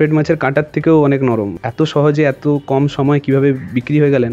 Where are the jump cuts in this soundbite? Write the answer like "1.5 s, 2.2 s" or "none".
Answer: 1.6 s